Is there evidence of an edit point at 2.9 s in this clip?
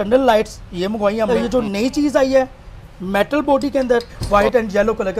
no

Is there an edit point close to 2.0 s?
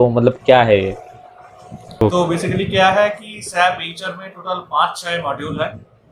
yes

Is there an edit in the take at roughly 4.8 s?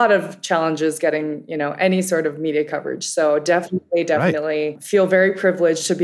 yes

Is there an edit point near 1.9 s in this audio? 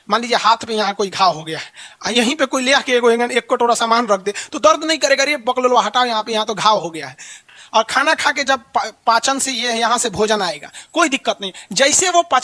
no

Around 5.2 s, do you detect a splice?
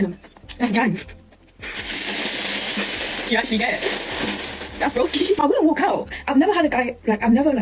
no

